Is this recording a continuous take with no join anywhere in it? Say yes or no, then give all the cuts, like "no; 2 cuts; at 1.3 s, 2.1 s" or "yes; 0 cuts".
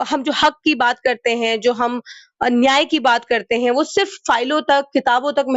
yes; 0 cuts